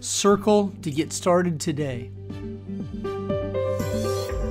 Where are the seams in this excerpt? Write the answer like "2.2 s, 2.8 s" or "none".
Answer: 2.0 s